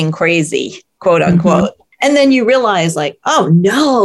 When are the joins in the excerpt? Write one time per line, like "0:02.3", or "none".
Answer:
0:01.8